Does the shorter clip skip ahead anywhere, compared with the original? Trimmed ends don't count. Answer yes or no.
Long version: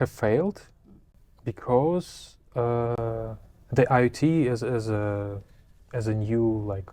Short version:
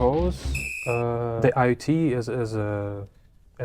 yes